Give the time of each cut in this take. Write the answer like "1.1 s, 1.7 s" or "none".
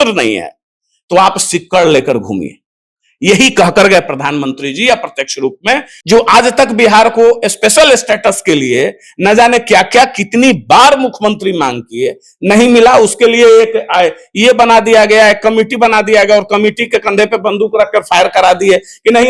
5.9 s